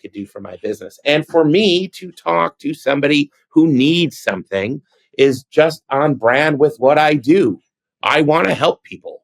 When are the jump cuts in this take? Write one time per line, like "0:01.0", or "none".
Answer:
none

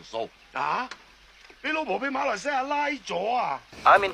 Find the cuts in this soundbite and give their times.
none

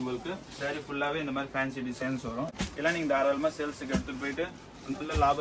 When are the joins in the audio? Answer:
0:02.5

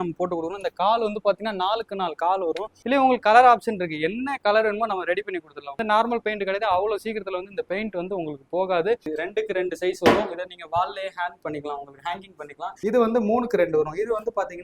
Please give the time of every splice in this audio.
0:02.8
0:05.8
0:09.0
0:12.8

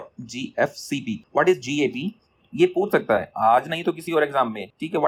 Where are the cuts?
none

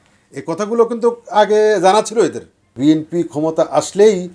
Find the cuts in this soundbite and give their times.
0:02.7

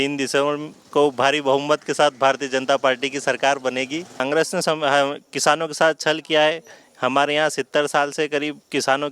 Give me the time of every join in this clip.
0:04.2

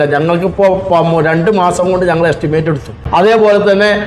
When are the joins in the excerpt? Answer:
0:02.9

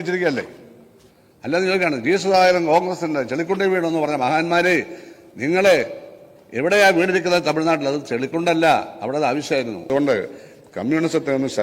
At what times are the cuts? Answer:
0:09.9

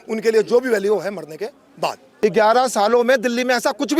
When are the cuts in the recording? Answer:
0:02.1

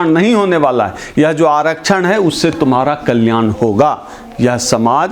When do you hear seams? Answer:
none

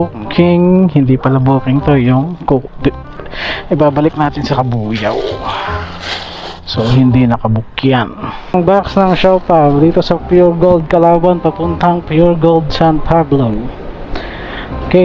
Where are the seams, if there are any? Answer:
0:08.5

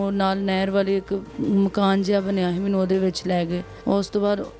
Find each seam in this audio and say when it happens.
0:01.3
0:03.7

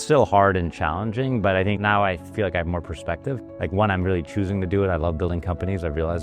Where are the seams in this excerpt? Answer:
0:01.8

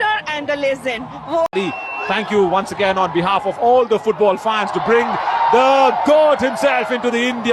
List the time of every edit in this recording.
0:01.5

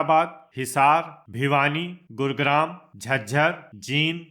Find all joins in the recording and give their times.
0:01.6

